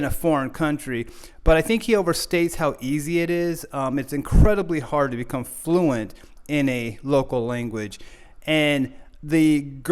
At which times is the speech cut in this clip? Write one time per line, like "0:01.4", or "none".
none